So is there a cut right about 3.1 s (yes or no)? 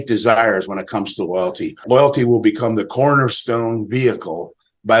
no